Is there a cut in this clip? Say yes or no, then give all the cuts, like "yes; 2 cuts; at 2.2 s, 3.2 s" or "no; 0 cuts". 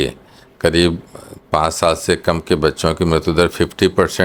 no; 0 cuts